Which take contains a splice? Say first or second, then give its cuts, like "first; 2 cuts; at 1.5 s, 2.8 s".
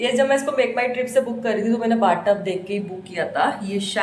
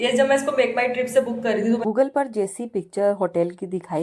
second; 1 cut; at 1.8 s